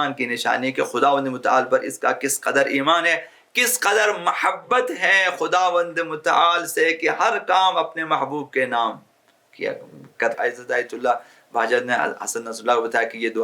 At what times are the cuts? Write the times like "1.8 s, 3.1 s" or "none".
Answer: 10.4 s